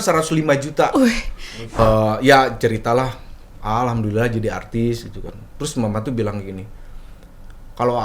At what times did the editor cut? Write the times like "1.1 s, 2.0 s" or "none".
1.7 s